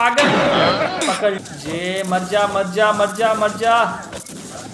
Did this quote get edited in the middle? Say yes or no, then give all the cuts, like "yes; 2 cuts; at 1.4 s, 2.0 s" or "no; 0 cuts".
yes; 1 cut; at 1.4 s